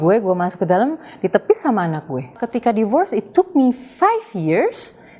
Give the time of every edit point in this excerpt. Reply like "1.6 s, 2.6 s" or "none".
2.4 s